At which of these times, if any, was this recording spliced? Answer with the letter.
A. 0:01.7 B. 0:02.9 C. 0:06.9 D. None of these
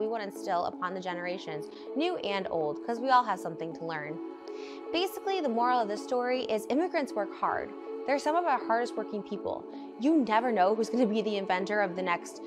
A